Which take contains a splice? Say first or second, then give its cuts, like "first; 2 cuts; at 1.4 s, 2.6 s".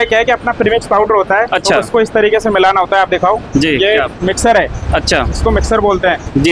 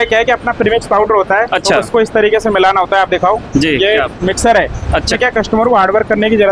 second; 1 cut; at 5.1 s